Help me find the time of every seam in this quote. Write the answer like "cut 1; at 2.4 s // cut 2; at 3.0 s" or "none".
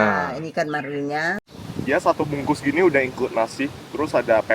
cut 1; at 1.5 s